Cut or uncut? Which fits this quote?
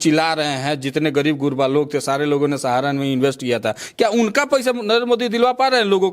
uncut